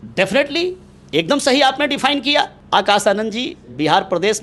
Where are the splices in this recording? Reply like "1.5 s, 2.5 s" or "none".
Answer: 2.6 s